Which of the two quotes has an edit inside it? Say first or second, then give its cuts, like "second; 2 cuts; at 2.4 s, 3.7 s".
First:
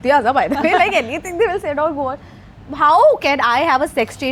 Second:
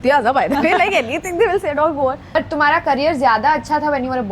second; 1 cut; at 2.3 s